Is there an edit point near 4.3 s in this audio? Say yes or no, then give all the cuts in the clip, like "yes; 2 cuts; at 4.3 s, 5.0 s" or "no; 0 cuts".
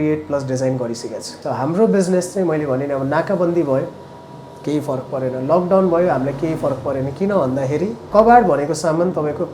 no; 2 cuts; at 1.3 s, 8.0 s